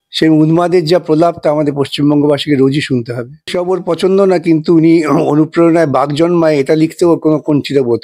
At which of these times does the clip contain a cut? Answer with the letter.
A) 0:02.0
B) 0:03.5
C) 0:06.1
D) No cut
B